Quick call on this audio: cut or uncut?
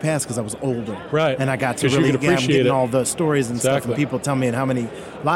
uncut